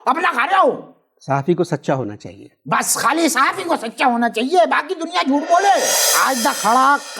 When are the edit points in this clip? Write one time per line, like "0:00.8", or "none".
0:06.1

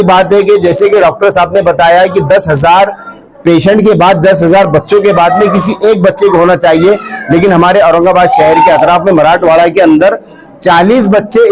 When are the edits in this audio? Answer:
none

